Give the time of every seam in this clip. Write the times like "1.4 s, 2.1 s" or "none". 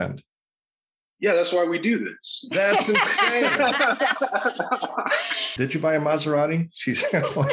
5.5 s